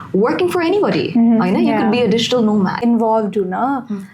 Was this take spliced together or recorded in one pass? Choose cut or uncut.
cut